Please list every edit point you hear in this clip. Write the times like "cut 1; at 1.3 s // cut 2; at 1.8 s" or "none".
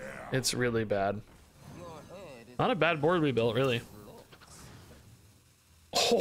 cut 1; at 1.3 s // cut 2; at 5.2 s